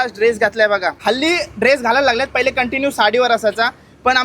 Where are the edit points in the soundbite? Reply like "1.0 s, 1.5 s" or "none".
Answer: 1.0 s